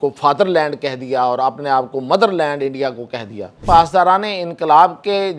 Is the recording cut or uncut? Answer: cut